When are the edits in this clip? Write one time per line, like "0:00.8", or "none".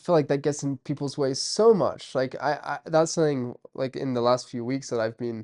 none